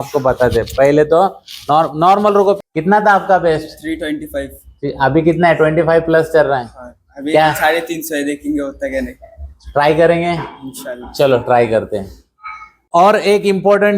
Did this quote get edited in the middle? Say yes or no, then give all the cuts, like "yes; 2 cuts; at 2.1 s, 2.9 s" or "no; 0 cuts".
yes; 2 cuts; at 2.6 s, 12.9 s